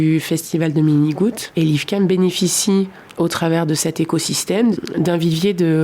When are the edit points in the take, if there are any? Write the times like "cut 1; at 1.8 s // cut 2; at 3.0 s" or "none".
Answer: cut 1; at 1.4 s // cut 2; at 3.0 s // cut 3; at 4.8 s